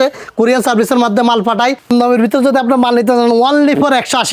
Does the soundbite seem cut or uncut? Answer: cut